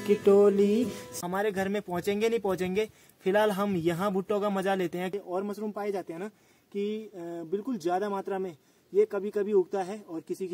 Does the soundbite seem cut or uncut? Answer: cut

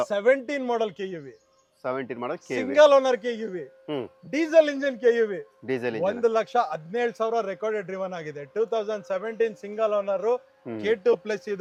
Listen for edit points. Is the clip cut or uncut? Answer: uncut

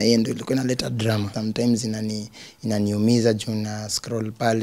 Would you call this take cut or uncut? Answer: cut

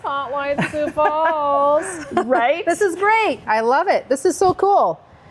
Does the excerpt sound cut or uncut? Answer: cut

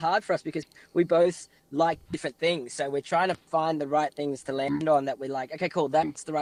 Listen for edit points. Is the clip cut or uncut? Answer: uncut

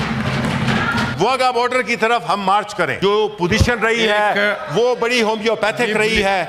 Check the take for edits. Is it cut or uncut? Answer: cut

